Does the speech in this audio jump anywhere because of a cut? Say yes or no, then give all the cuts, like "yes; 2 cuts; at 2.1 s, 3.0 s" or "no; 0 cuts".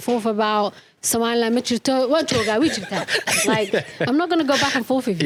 no; 0 cuts